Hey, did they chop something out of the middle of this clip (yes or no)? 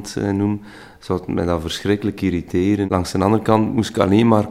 yes